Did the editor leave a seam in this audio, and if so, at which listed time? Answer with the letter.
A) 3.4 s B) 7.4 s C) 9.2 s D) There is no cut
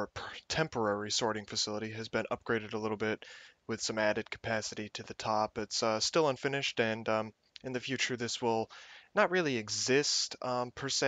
D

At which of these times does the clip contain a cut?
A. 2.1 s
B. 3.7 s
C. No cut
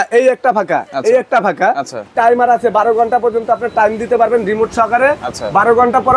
A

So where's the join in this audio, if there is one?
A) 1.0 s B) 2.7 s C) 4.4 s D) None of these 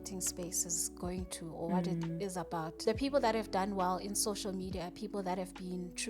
B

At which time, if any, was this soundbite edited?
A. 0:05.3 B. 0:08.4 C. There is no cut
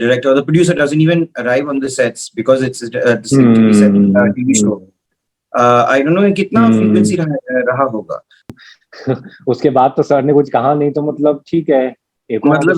B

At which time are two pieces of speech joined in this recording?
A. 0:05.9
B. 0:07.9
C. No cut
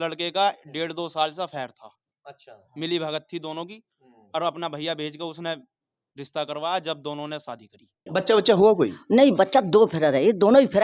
B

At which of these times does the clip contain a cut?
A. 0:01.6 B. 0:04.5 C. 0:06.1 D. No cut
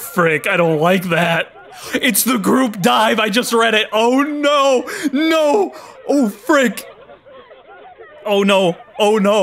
D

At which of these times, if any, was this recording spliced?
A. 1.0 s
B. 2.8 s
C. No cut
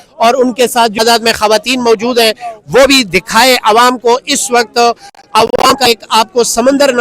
A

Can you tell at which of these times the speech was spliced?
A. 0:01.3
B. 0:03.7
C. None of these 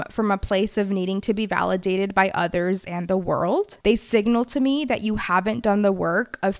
B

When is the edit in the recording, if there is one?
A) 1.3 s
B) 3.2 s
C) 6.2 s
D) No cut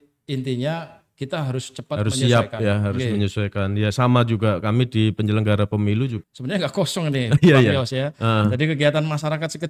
C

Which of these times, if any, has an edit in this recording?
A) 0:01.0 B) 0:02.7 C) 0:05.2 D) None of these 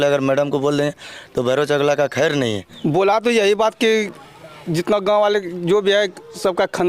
B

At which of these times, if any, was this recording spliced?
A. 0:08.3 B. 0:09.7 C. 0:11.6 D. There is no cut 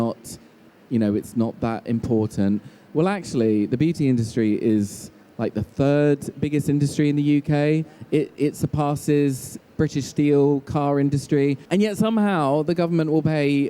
C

